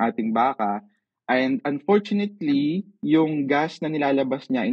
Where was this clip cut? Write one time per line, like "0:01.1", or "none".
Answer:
0:02.9